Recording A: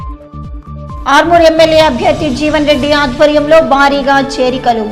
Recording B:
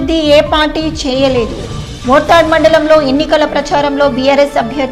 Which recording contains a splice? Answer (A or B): A